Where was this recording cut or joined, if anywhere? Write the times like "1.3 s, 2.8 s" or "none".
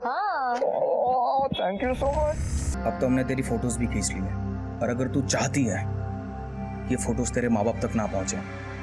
2.7 s